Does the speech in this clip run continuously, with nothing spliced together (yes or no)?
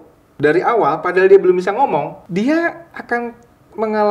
no